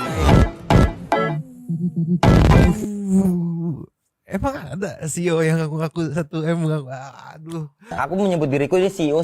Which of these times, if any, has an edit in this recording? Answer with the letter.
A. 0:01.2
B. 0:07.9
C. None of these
B